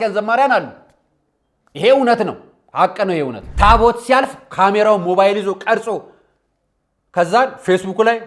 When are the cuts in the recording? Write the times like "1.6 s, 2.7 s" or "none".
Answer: 3.4 s